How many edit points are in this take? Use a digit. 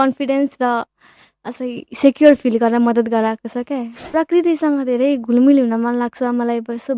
1